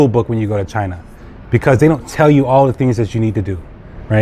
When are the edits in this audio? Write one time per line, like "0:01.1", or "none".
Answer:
none